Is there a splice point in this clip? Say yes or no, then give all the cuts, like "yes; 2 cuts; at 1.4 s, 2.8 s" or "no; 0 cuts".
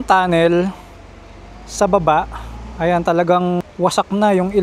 yes; 1 cut; at 3.6 s